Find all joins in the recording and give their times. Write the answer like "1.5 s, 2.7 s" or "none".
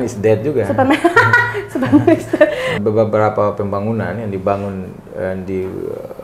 2.8 s